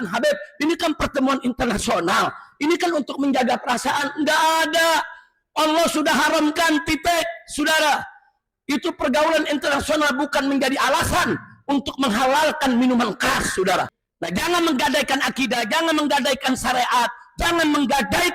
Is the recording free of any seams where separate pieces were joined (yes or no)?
no